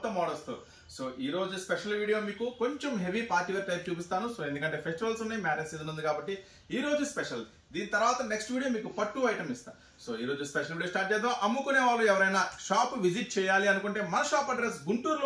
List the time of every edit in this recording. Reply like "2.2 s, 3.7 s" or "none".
none